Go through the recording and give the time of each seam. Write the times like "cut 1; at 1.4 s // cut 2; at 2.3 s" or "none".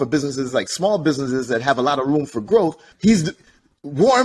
cut 1; at 2.9 s